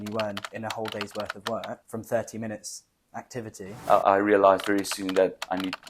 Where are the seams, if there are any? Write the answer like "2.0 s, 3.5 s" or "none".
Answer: 3.8 s